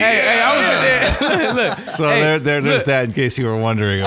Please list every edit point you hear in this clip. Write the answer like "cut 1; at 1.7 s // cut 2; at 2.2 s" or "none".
none